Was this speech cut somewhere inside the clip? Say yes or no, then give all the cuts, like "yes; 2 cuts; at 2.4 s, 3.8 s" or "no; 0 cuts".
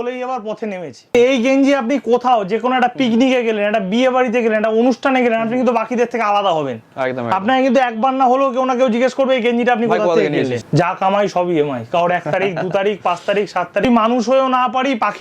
yes; 3 cuts; at 1.1 s, 10.6 s, 13.8 s